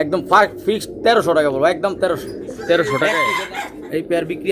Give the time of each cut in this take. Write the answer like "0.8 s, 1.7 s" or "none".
3.2 s